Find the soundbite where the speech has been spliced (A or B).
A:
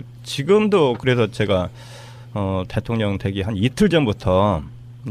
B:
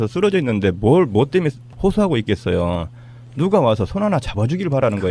A